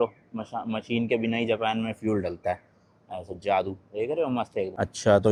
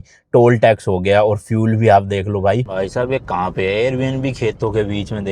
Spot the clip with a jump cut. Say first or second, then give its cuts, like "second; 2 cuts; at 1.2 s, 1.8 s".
second; 1 cut; at 2.7 s